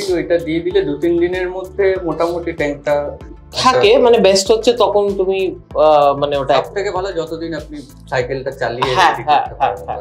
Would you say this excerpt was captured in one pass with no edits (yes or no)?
yes